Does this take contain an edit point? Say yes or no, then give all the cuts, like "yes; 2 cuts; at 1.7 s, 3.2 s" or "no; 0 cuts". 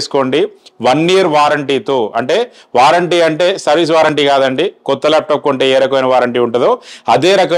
no; 0 cuts